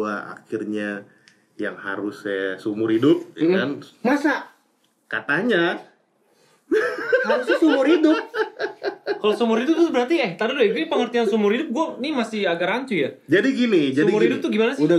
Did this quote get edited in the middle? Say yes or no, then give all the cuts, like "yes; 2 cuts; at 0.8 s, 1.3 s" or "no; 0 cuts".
no; 0 cuts